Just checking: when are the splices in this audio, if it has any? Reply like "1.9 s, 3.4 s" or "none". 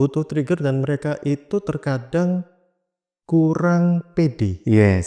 none